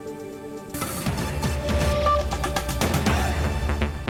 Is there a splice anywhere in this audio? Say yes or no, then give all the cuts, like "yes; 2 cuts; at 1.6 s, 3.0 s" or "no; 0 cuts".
no; 0 cuts